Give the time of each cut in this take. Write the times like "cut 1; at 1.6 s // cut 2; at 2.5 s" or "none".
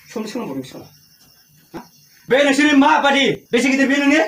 cut 1; at 1.8 s // cut 2; at 3.4 s